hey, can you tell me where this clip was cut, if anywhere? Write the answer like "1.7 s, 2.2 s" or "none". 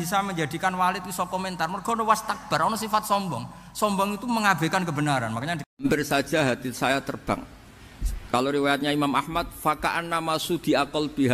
5.8 s